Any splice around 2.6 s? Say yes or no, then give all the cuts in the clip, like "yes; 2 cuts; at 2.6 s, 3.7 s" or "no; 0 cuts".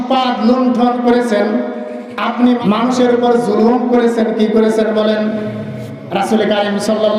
yes; 1 cut; at 2.6 s